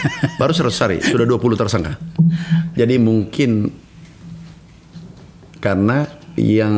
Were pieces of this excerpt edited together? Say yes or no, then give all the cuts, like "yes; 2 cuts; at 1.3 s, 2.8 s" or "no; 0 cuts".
no; 0 cuts